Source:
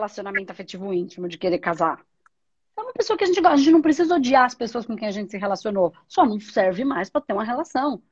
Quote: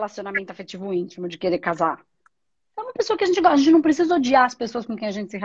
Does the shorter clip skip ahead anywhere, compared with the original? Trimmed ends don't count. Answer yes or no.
no